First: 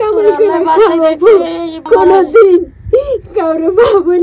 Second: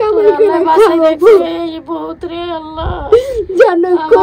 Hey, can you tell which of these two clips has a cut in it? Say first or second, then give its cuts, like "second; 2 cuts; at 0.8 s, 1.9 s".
first; 1 cut; at 1.8 s